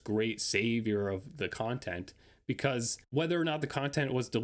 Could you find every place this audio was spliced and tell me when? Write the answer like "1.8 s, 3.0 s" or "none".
3.0 s